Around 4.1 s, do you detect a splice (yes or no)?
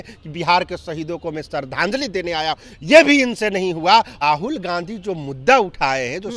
yes